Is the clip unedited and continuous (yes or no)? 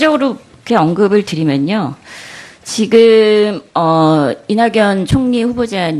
yes